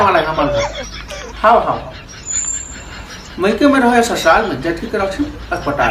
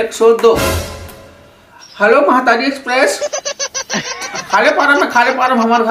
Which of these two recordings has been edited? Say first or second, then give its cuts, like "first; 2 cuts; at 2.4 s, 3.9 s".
second; 1 cut; at 4.9 s